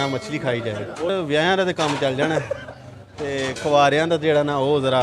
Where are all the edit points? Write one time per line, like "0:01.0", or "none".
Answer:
0:01.1